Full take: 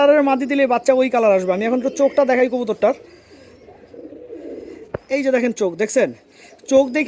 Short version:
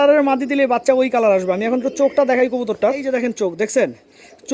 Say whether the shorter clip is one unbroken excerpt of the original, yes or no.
no